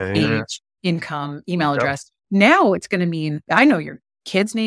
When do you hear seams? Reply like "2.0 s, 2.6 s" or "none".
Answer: 3.4 s